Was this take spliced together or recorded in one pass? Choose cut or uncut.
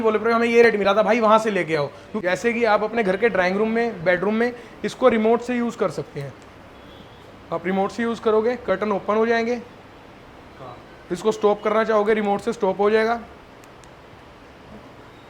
cut